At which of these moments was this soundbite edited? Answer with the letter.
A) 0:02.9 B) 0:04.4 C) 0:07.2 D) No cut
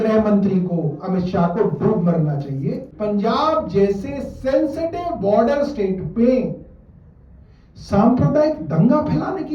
A